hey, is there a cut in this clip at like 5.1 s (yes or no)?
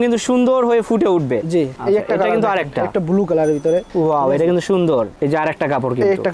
yes